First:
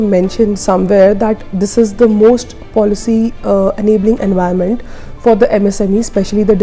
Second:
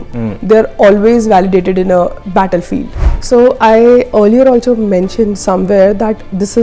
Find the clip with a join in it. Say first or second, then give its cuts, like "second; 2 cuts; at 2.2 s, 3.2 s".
second; 1 cut; at 3.1 s